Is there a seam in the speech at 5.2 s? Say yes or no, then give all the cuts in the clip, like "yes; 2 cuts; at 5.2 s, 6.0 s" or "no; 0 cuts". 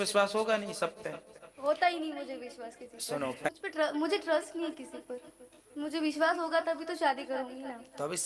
no; 1 cut; at 3.5 s